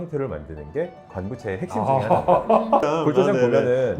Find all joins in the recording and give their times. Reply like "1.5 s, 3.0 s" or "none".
2.9 s